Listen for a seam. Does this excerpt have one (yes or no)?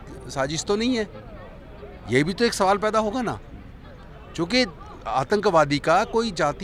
no